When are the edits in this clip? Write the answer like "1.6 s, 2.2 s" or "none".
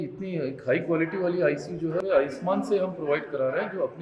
2.0 s